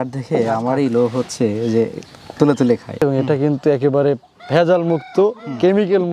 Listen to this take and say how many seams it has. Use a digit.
1